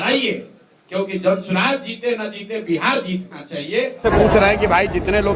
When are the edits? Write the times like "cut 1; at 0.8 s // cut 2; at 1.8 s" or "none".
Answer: cut 1; at 4.0 s